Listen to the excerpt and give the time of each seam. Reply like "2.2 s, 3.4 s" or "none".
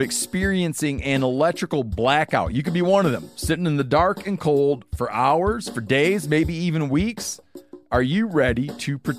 none